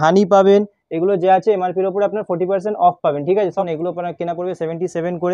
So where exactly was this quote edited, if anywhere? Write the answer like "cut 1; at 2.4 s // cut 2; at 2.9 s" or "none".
cut 1; at 3.6 s